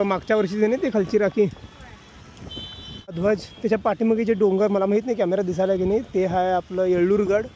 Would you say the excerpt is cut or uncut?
cut